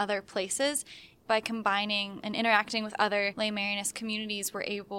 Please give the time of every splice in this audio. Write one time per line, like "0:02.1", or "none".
0:01.1
0:02.2
0:03.3